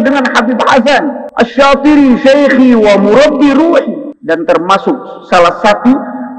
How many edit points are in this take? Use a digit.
2